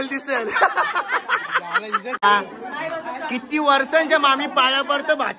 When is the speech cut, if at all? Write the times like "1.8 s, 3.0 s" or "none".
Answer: 2.2 s